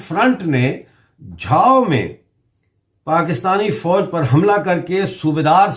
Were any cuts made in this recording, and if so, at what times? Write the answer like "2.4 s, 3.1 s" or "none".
none